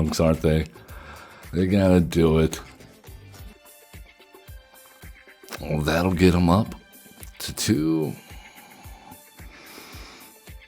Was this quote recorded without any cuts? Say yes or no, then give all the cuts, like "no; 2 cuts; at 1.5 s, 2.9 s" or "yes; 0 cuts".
no; 1 cut; at 3.5 s